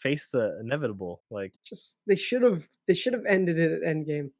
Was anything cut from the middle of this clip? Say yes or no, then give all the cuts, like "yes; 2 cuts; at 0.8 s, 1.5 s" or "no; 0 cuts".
yes; 1 cut; at 1.3 s